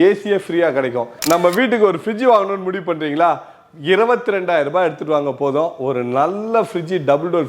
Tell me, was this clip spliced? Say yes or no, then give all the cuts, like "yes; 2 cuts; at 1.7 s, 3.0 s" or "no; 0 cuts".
yes; 1 cut; at 1.1 s